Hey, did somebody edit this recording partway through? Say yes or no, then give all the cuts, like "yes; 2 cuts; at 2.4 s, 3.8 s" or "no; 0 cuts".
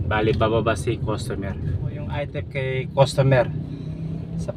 yes; 1 cut; at 2.4 s